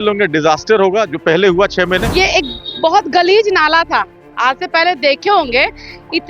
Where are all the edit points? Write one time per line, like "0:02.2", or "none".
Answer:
0:02.1